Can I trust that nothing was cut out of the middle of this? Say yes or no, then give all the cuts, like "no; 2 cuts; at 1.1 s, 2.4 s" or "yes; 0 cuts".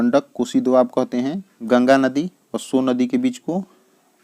no; 1 cut; at 1.5 s